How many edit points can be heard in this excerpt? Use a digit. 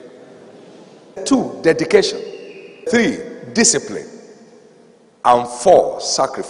2